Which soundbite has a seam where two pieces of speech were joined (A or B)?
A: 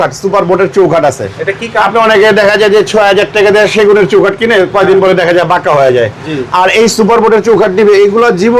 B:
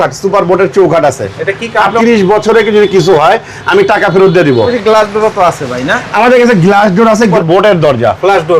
B